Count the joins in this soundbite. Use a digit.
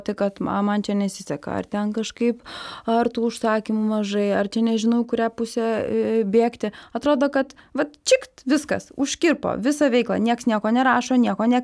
0